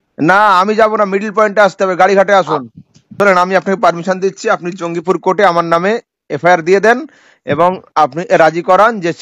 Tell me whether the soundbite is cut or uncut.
cut